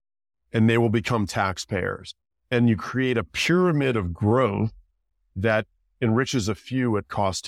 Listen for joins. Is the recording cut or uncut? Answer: uncut